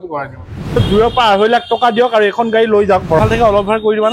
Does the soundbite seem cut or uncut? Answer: cut